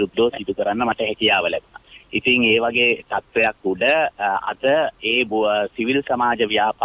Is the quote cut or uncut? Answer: uncut